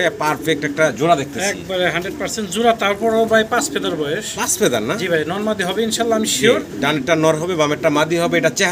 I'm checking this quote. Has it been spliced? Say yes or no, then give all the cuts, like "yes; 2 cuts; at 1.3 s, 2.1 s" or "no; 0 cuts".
no; 0 cuts